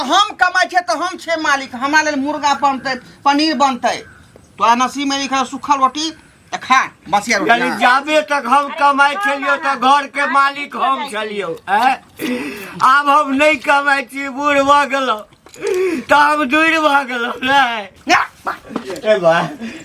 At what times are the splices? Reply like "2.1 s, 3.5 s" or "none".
17.9 s